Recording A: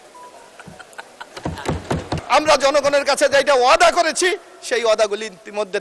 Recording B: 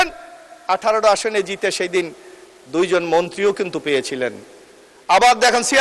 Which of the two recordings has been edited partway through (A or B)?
A